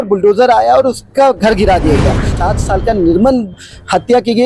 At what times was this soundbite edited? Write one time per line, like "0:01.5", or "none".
0:02.3

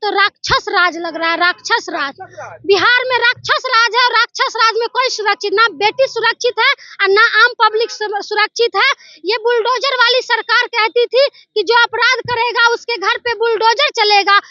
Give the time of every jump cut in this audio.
none

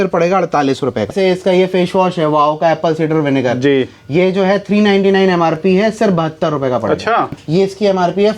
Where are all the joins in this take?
0:01.1
0:07.4

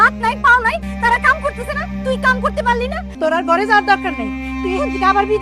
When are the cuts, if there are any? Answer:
0:00.9
0:03.0

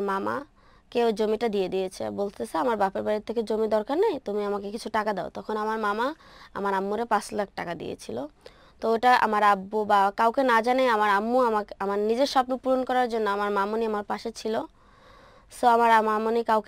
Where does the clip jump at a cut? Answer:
none

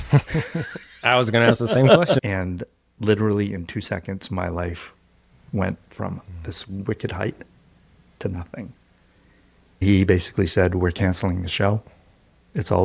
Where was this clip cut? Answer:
0:02.2
0:09.8

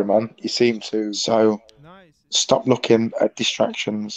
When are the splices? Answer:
0:01.2

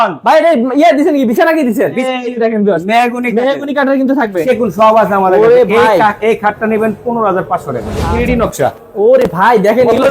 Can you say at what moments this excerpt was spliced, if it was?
0:02.0
0:04.4
0:08.0

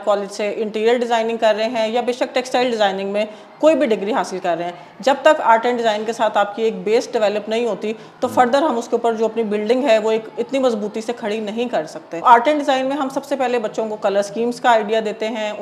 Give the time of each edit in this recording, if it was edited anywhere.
0:12.2

